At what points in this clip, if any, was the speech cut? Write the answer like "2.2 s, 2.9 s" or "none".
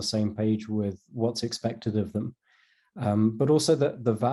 none

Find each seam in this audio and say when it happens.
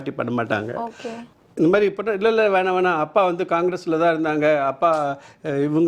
1.3 s

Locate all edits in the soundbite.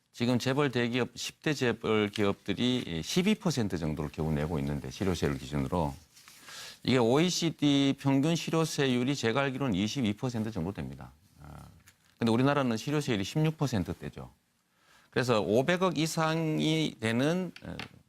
6.3 s

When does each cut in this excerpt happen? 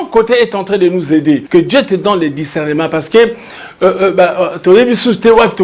1.4 s

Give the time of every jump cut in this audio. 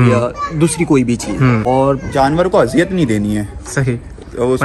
1.6 s

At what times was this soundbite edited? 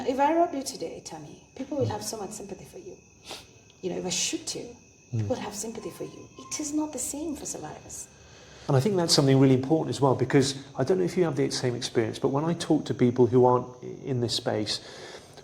8.6 s

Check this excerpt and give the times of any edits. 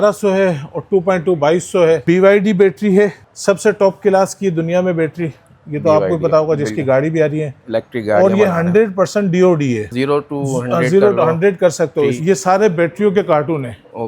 2.0 s, 3.3 s, 9.9 s, 12.2 s

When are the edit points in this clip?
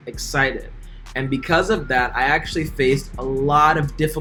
none

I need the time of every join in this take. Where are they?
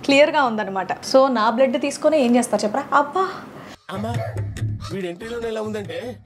1.0 s

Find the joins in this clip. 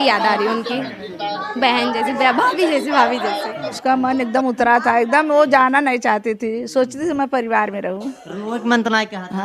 3.7 s

